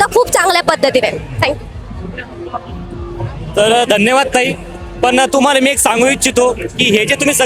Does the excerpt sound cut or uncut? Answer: uncut